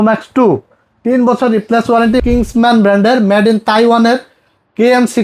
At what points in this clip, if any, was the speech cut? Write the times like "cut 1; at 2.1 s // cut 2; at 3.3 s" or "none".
cut 1; at 2.2 s